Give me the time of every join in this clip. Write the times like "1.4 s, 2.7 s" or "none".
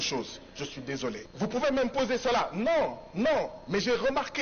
1.3 s